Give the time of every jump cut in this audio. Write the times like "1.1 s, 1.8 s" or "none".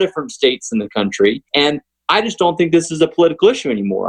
1.5 s